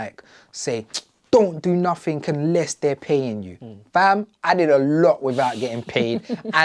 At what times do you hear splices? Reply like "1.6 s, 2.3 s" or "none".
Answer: none